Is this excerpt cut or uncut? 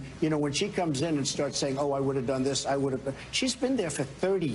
uncut